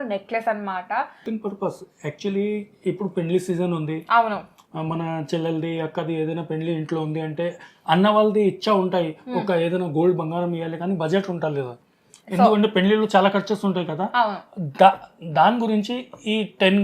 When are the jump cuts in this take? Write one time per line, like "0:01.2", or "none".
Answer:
0:01.2